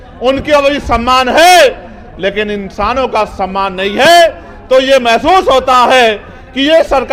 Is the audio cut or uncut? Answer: uncut